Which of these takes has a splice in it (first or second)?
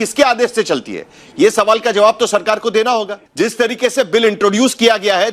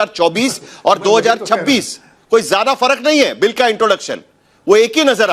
first